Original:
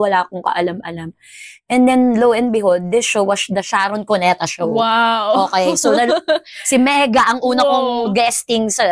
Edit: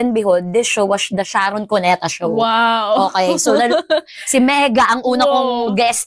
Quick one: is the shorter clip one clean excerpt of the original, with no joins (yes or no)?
yes